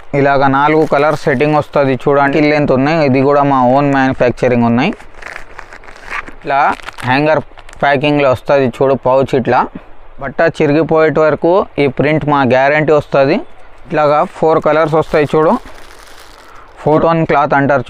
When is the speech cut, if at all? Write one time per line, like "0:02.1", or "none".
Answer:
0:02.3
0:06.5
0:10.3
0:13.9
0:16.9